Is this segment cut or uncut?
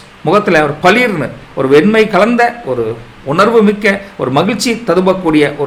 uncut